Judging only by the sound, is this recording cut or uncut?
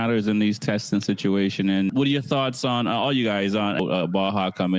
cut